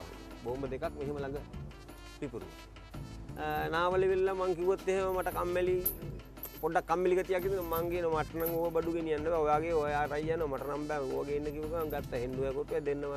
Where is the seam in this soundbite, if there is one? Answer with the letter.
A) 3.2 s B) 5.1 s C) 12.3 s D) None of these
A